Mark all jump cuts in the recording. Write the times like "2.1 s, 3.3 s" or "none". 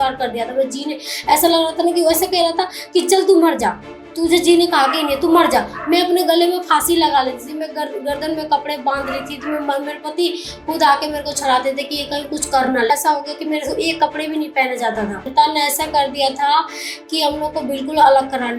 12.9 s, 15.2 s